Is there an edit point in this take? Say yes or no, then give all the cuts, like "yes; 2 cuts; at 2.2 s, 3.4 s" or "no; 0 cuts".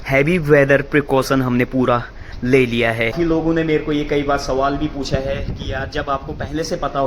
yes; 1 cut; at 3.1 s